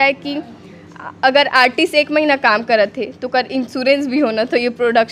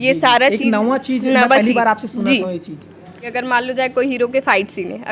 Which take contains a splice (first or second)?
second